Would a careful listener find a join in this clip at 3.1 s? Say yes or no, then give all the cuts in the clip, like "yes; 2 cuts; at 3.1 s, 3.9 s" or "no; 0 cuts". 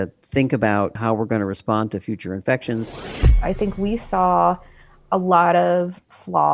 yes; 1 cut; at 3.1 s